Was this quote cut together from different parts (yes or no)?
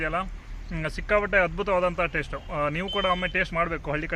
no